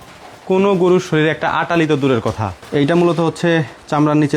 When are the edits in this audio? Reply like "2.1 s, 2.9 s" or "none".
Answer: 2.5 s